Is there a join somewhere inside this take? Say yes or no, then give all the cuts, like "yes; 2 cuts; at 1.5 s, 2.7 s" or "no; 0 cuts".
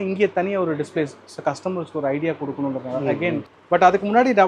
yes; 1 cut; at 3.5 s